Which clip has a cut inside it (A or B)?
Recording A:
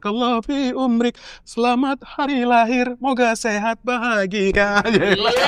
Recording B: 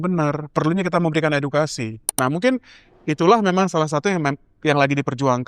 B